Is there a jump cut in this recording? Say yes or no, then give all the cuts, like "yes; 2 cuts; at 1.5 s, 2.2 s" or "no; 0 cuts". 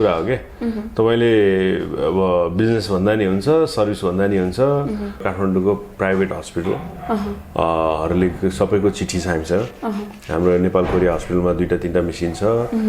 yes; 1 cut; at 5.2 s